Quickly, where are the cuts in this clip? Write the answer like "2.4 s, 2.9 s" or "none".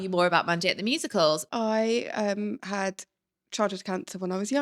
1.5 s